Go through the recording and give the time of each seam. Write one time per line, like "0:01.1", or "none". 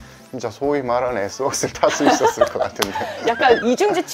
none